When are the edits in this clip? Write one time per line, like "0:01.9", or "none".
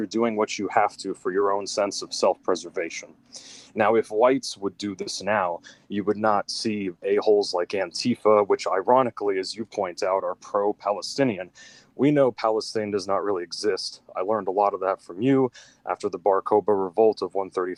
none